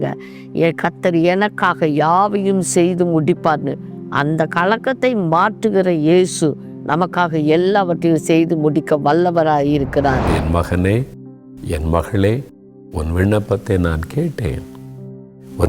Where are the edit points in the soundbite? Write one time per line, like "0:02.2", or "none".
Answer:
0:10.3